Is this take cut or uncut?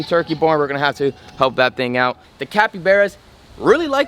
cut